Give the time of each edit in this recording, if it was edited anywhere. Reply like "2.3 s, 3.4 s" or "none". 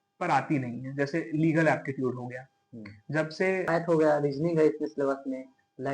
3.7 s